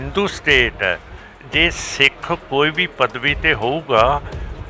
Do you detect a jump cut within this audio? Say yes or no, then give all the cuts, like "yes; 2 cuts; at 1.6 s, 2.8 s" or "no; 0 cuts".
no; 0 cuts